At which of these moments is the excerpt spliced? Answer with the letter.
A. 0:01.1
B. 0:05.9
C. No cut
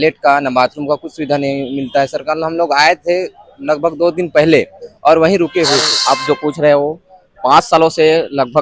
B